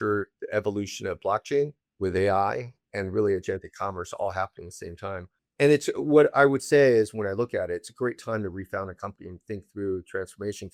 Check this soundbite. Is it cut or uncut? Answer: uncut